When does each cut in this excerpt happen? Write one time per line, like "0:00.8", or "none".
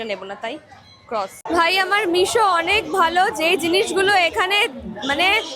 0:01.5